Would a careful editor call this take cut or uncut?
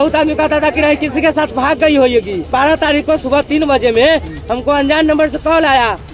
cut